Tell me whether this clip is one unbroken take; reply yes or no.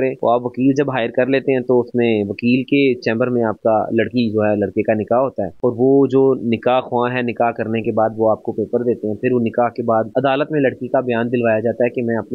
yes